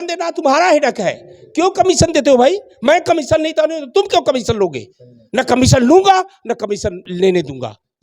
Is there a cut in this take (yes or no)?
yes